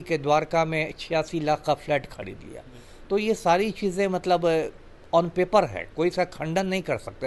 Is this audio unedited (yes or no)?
yes